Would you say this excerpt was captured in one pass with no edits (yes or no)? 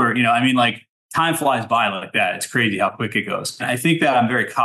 no